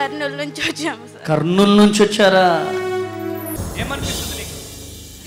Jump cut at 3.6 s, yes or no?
yes